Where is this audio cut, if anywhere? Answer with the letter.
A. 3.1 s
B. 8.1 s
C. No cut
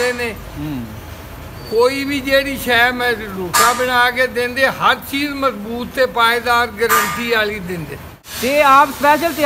B